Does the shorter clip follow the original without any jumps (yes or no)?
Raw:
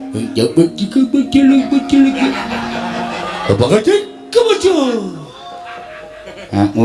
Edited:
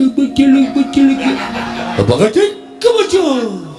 no